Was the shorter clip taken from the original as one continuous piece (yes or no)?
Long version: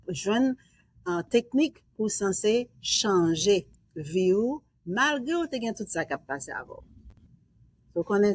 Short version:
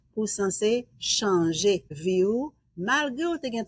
no